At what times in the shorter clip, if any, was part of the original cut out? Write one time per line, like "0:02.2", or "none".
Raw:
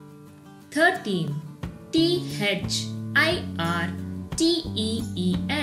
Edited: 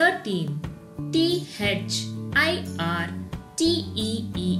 none

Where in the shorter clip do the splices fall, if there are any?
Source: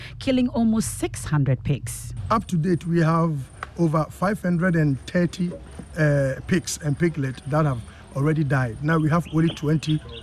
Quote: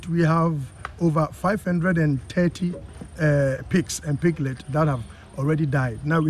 none

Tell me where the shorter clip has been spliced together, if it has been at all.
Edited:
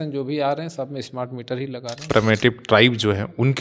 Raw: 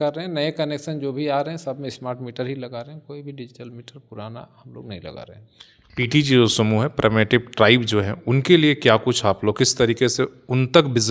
0:02.0

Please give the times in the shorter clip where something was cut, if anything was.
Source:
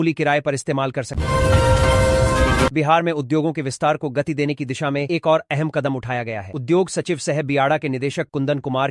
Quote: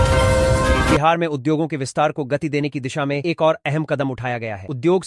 0:00.9

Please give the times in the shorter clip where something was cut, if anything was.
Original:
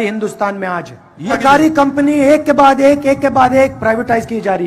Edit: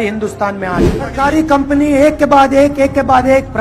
0:01.1

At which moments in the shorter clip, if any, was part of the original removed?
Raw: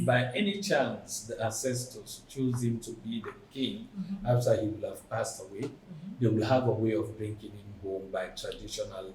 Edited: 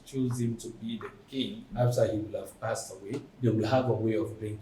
0:01.7
0:03.3

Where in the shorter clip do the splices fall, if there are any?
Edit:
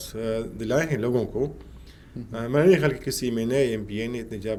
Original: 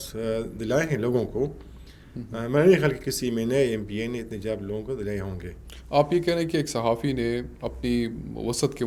none

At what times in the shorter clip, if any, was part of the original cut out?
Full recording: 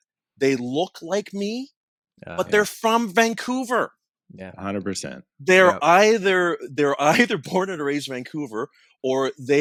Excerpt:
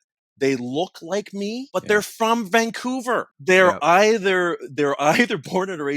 0:01.6
0:03.3

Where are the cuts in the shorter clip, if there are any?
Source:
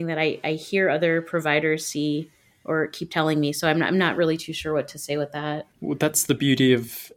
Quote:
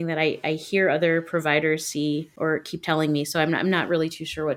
0:02.3

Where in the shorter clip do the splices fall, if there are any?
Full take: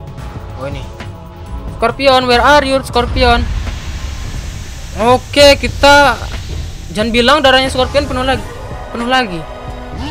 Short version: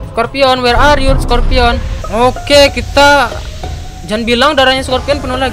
0:01.9

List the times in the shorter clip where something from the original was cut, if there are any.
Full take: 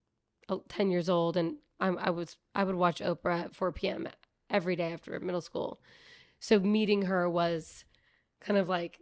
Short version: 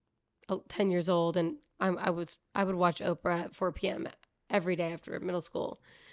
none

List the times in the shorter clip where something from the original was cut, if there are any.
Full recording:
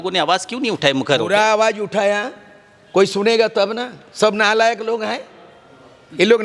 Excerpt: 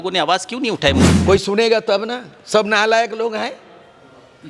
0:01.0

